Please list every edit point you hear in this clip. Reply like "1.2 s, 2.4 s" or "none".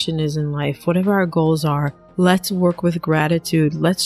2.0 s